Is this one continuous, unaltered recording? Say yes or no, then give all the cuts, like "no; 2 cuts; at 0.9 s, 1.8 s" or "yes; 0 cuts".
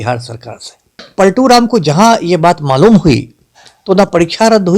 no; 1 cut; at 1.0 s